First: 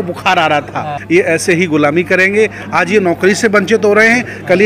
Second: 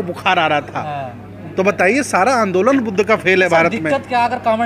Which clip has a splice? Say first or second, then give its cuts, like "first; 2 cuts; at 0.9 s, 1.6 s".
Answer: first; 1 cut; at 0.9 s